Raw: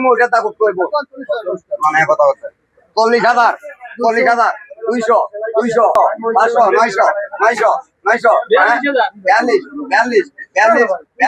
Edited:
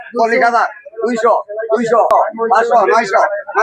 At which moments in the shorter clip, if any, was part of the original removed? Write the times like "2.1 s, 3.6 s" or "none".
none